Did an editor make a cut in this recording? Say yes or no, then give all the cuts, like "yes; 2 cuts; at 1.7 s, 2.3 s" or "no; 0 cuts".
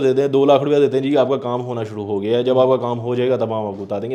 no; 0 cuts